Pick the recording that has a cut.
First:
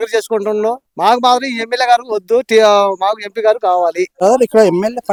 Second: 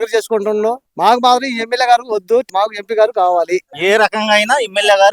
second; 2 cuts; at 2.5 s, 3.7 s

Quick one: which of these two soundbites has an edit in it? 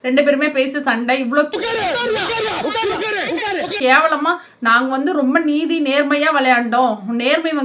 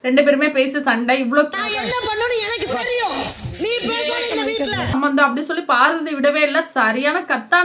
second; 2 cuts; at 1.5 s, 4.9 s

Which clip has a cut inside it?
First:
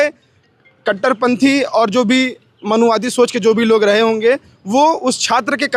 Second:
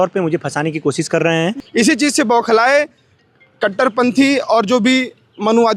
second; 1 cut; at 1.6 s

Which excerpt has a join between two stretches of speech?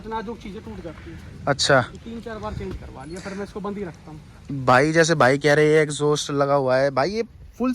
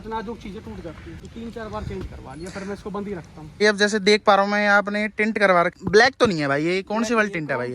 second; 3 cuts; at 1.3 s, 3.6 s, 5.7 s

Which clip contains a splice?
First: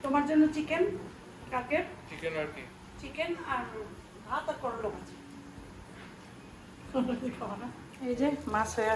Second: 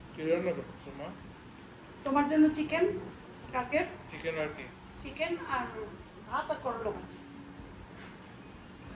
first; 1 cut; at 7.9 s

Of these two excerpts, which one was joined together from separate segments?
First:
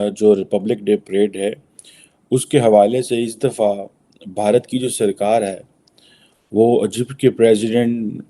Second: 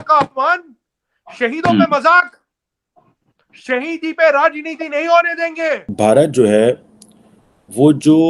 second; 1 cut; at 5.9 s

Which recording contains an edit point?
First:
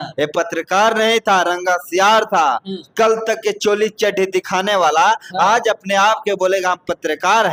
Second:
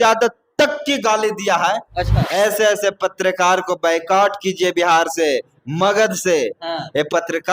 second; 1 cut; at 2.2 s

